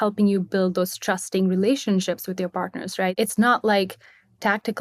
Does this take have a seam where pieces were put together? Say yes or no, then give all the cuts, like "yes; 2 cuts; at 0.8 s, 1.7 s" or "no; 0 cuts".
yes; 1 cut; at 3.1 s